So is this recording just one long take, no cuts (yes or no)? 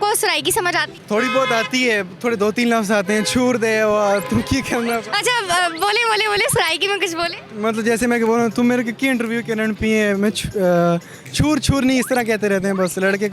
no